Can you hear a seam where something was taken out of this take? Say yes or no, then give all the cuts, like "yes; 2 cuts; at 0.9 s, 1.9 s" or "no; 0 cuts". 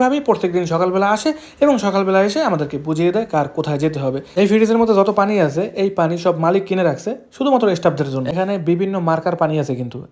yes; 2 cuts; at 4.3 s, 8.3 s